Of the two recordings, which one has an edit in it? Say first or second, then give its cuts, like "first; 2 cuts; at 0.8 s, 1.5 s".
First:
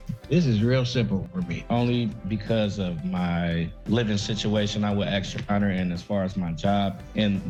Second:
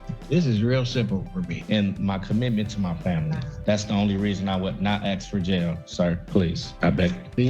second; 2 cuts; at 1.6 s, 6.2 s